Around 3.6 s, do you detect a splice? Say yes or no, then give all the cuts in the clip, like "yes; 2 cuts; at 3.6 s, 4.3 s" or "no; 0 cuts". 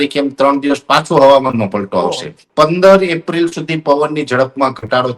no; 1 cut; at 2.4 s